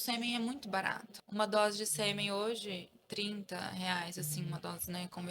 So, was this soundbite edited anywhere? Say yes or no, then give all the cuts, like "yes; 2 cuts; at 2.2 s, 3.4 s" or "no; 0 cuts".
yes; 1 cut; at 1.1 s